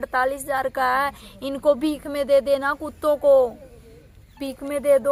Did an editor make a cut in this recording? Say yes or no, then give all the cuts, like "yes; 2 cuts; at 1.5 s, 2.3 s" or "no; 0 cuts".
no; 0 cuts